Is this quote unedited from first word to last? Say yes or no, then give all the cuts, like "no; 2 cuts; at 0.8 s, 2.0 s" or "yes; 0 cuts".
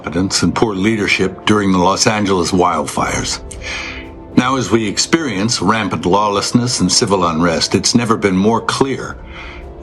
yes; 0 cuts